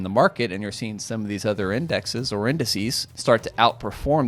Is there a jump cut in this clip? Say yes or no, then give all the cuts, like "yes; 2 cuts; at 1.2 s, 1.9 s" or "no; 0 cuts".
yes; 1 cut; at 3.1 s